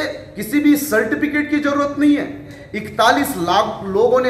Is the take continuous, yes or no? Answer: no